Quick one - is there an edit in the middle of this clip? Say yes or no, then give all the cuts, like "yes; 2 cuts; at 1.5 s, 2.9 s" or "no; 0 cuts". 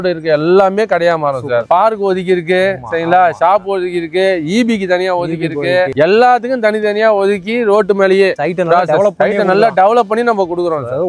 no; 0 cuts